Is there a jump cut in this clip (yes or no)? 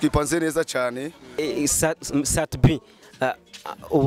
yes